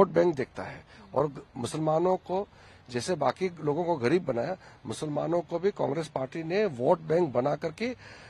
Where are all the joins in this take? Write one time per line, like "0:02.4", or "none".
none